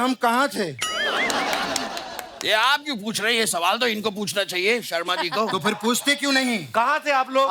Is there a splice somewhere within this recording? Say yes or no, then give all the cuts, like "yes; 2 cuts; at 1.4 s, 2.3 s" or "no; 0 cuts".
no; 0 cuts